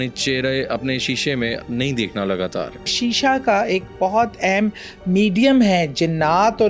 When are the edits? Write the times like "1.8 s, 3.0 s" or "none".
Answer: 1.6 s, 2.9 s